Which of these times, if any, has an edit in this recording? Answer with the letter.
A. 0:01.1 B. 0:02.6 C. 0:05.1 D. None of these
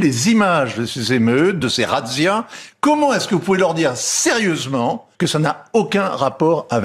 C